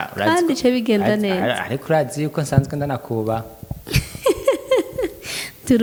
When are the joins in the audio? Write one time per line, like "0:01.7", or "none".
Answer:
none